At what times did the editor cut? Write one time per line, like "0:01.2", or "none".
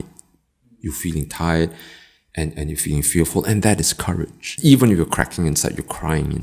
0:04.5